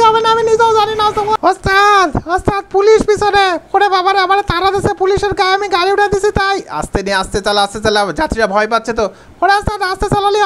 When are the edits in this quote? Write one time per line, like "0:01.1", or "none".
0:01.4